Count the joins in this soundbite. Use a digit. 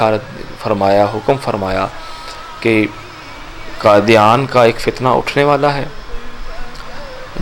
0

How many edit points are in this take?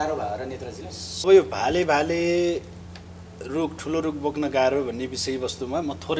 1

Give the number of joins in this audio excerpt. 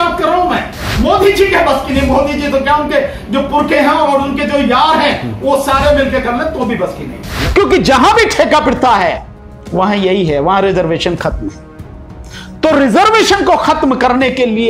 2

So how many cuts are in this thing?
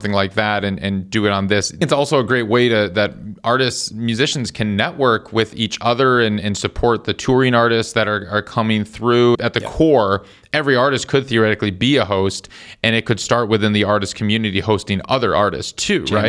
2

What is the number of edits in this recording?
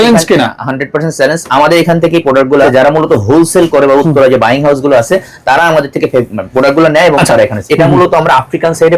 2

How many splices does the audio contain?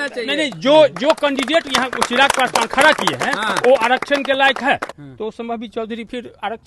1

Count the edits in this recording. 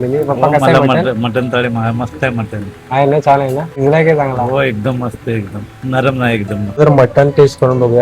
2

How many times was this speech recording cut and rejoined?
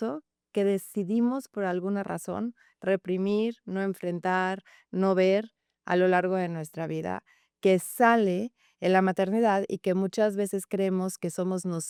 0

